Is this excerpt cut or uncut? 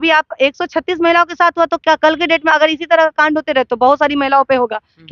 uncut